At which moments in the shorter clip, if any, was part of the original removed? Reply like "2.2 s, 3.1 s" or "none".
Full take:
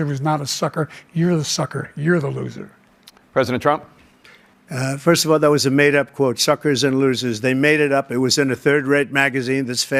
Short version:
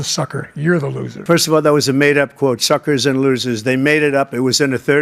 1.2 s